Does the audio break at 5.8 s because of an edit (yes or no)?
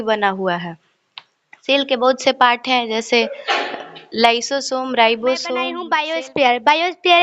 yes